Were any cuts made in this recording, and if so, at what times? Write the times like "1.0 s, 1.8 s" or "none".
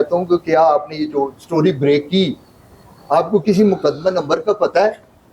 none